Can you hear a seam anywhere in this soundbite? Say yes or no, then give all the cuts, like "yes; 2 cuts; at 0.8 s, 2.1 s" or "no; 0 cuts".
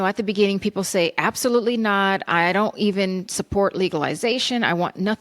no; 0 cuts